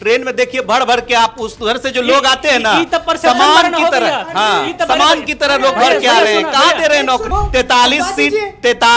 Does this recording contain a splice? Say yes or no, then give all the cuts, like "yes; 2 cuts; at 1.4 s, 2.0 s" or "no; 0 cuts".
yes; 1 cut; at 7.2 s